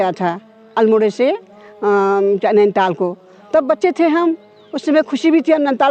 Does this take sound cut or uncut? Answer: uncut